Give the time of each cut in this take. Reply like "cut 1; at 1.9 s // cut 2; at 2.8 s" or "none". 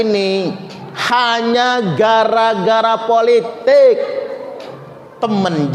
none